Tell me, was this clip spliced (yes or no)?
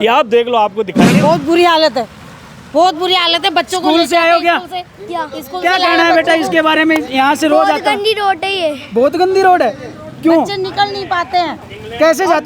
yes